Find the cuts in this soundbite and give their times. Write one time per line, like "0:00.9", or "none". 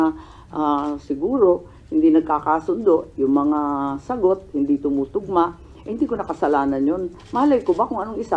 none